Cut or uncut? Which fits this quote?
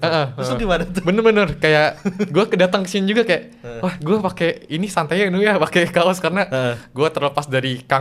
uncut